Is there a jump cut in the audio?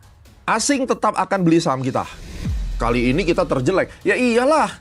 yes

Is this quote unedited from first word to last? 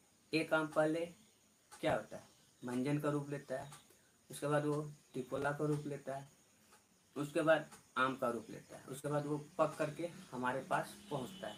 yes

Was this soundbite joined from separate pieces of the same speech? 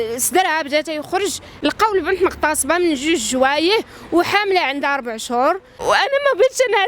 yes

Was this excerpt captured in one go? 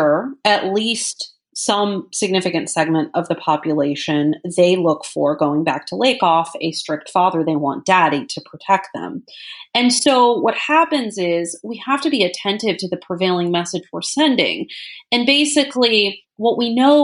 yes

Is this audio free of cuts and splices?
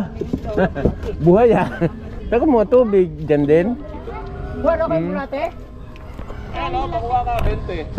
yes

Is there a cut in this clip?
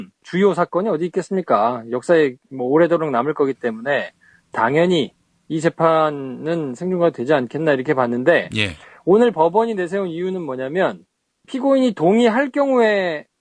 yes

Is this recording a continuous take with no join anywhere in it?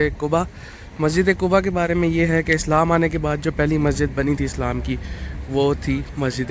yes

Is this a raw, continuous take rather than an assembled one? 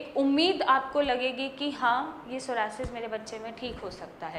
yes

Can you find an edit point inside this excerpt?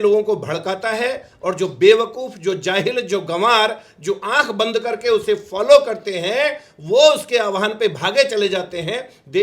no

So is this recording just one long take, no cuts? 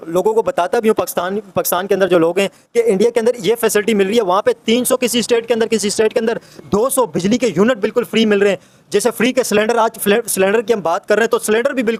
yes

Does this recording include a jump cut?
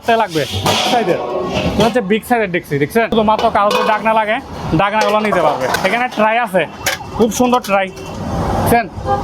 yes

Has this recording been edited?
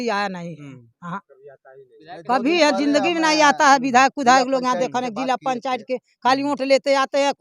no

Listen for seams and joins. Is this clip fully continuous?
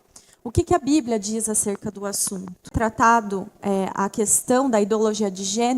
no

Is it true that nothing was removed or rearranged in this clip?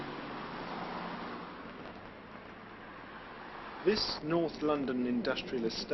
yes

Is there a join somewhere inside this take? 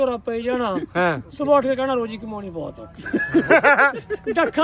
no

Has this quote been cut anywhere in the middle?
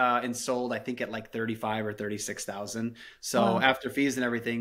no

